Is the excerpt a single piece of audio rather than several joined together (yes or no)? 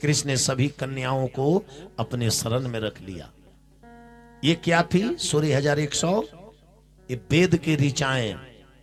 yes